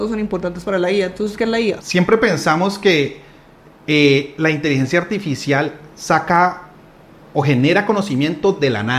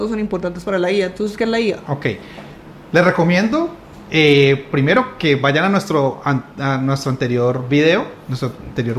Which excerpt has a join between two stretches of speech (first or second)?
first